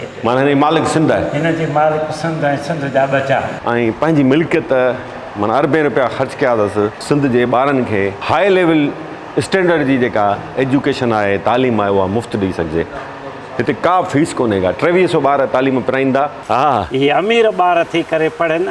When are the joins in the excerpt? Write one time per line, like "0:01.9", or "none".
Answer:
0:03.6
0:16.4